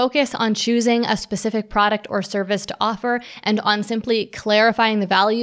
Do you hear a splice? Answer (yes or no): no